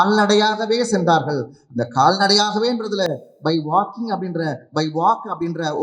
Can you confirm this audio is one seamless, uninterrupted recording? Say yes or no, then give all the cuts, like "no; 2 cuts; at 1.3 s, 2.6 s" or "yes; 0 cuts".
yes; 0 cuts